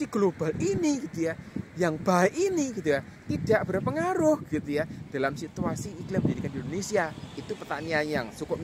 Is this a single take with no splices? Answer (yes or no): yes